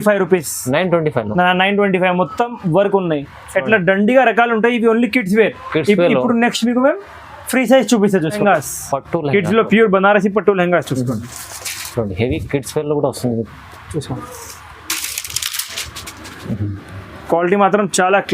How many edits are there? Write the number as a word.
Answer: one